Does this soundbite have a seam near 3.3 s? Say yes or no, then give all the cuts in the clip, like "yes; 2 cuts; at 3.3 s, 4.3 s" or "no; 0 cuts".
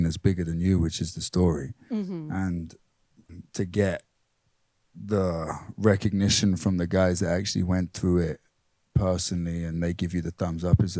yes; 1 cut; at 3.3 s